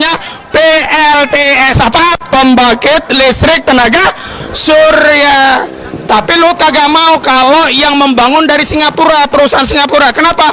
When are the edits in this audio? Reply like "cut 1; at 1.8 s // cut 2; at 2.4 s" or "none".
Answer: none